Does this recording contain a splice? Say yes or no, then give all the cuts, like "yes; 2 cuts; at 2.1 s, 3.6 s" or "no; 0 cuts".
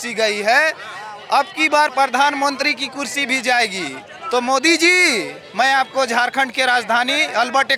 no; 0 cuts